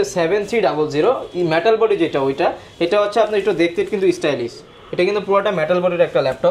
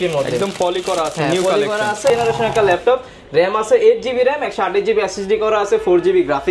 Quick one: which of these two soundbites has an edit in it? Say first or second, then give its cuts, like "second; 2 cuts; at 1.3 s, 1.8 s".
second; 1 cut; at 2.1 s